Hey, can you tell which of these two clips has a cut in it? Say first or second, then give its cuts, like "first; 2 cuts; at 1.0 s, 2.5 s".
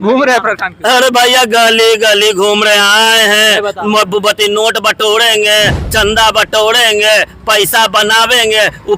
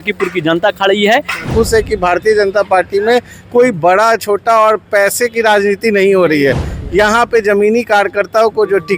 second; 1 cut; at 1.5 s